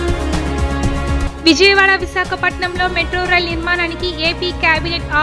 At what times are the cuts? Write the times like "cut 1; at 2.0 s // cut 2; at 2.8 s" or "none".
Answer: cut 1; at 1.0 s